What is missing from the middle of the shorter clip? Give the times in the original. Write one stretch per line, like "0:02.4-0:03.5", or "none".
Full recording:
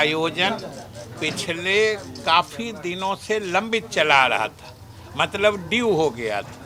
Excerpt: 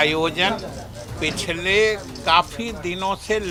none